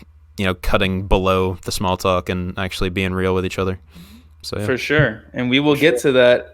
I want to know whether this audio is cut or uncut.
uncut